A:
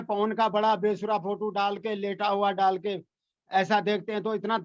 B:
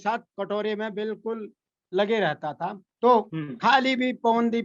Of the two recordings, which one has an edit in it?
B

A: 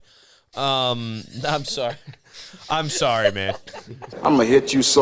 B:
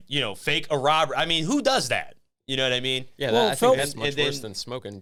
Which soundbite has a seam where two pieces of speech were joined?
A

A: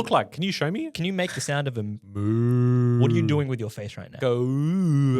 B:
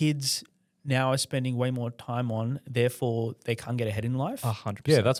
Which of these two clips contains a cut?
A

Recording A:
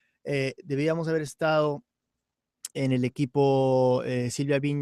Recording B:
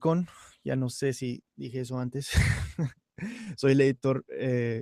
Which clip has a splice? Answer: B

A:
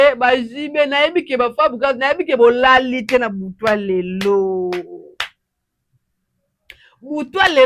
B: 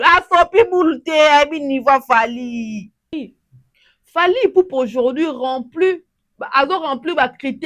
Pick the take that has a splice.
B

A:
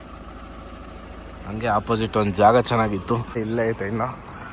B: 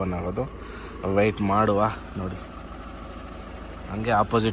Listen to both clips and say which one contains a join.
A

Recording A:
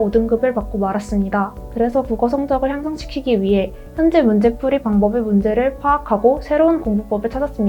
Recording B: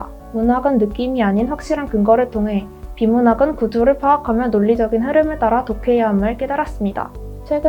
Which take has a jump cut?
A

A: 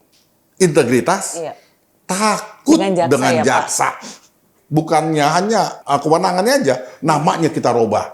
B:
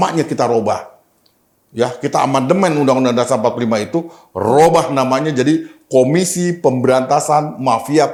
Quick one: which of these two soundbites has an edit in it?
A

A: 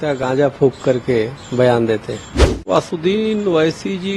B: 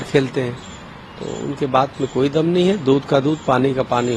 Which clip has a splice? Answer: A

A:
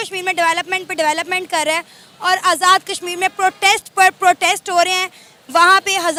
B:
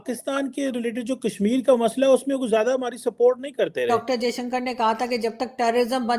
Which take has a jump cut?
B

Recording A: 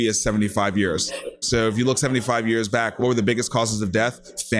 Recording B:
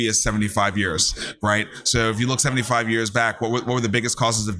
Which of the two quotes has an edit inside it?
A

